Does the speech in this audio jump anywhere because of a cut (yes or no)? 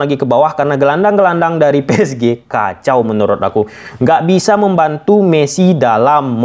no